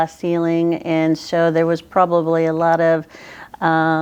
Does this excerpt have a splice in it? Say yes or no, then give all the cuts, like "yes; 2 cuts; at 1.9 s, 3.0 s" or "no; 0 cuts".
no; 0 cuts